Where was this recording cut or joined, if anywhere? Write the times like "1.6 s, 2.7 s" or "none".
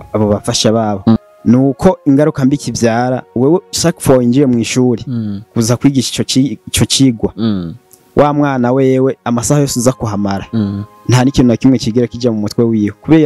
1.2 s

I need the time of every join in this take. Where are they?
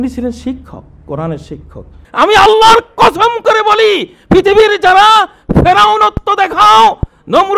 2.0 s

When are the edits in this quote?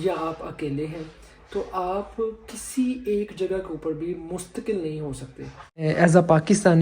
5.8 s

